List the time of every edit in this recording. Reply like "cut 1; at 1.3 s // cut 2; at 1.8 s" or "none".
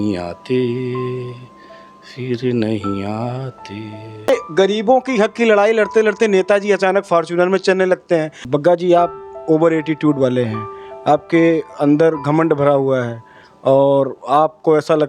cut 1; at 4.3 s // cut 2; at 8.5 s